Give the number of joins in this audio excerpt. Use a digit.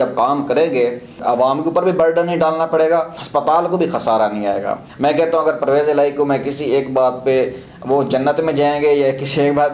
3